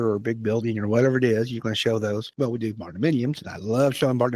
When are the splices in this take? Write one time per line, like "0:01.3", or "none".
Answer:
0:02.3